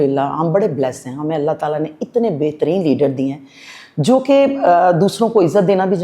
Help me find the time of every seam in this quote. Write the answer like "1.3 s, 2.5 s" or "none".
none